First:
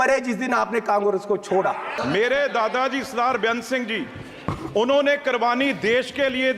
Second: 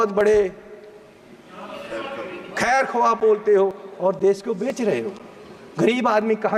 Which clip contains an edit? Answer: first; 1 cut; at 1.9 s

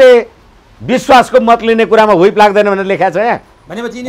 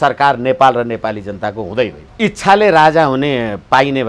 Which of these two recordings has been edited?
second; 1 cut; at 2.0 s

